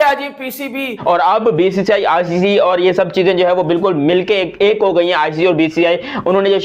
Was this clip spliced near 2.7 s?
no; 1 cut; at 1.0 s

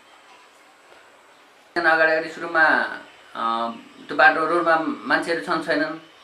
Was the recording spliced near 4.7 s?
no; 1 cut; at 1.7 s

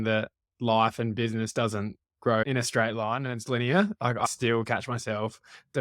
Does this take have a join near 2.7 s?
no; 1 cut; at 4.3 s

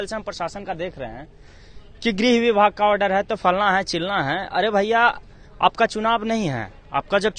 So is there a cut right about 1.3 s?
no; 0 cuts

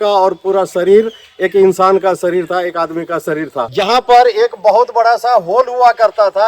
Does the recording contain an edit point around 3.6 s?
yes; 1 cut; at 3.6 s

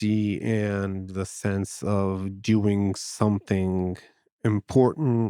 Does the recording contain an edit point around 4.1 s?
no; 0 cuts

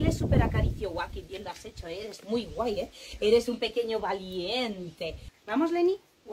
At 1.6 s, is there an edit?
no; 1 cut; at 5.3 s

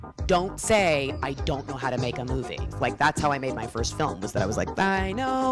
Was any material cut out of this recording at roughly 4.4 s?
no; 1 cut; at 2.6 s

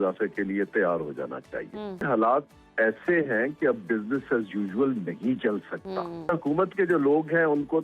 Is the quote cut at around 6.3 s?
yes; 2 cuts; at 2.1 s, 6.3 s

